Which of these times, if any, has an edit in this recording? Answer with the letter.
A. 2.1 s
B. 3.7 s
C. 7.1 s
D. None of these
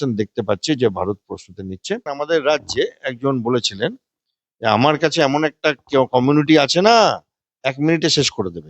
A